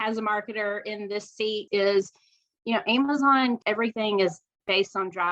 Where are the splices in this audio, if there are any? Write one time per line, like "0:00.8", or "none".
0:01.6
0:03.6

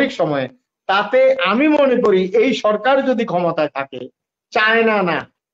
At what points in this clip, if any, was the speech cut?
none

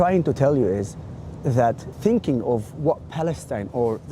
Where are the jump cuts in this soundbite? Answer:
0:01.9

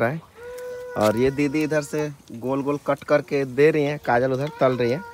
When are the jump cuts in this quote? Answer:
none

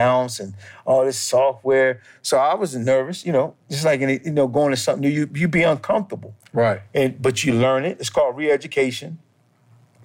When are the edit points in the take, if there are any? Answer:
none

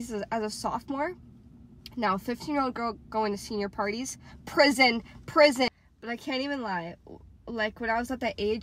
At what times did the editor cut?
none

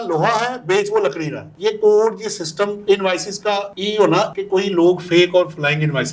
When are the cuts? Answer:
0:01.5
0:02.8
0:04.3

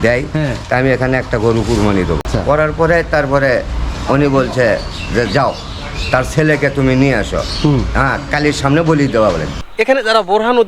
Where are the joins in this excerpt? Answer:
0:02.2
0:09.7

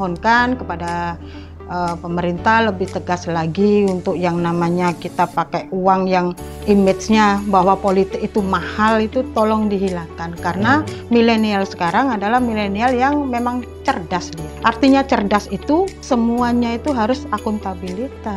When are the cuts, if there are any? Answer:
0:06.5
0:14.4
0:16.0

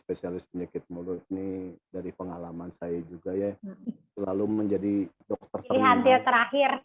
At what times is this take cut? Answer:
0:05.2

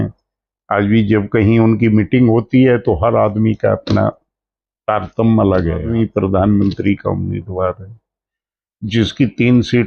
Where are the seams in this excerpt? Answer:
0:05.9

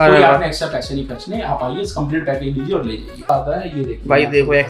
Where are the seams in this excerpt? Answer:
0:03.3

